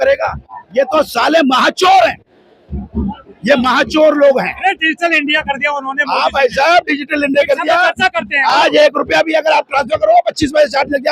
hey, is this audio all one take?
yes; 0 cuts

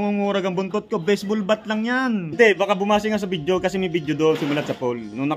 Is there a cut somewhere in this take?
yes; 1 cut; at 2.3 s

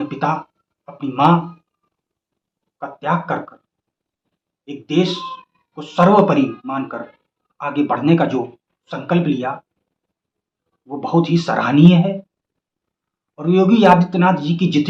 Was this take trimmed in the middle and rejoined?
no; 0 cuts

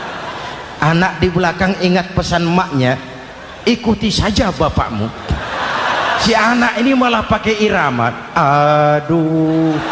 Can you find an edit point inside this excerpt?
yes; 1 cut; at 6.2 s

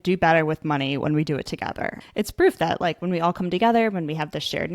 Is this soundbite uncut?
no; 1 cut; at 2.0 s

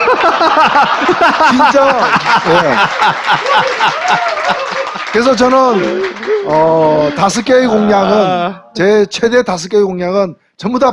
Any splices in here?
yes; 1 cut; at 7.7 s

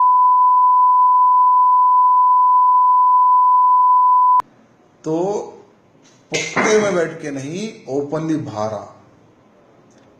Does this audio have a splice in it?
yes; 1 cut; at 6.1 s

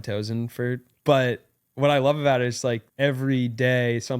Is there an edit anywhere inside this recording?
yes; 2 cuts; at 0.9 s, 2.9 s

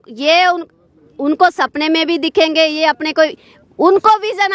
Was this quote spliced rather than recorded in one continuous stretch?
no; 0 cuts

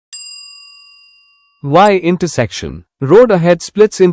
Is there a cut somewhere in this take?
no; 0 cuts

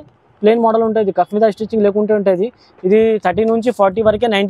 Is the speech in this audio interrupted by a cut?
no; 0 cuts

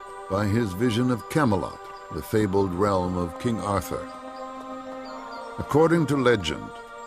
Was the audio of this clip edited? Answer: no; 0 cuts

